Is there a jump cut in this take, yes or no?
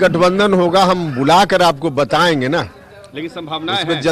no